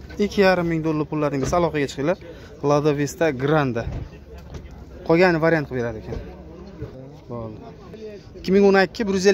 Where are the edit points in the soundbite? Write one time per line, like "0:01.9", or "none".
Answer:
0:06.9